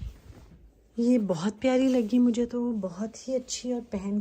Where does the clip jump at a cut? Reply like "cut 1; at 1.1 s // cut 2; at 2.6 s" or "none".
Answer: none